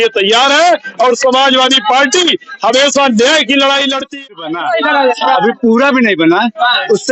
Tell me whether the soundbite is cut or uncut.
cut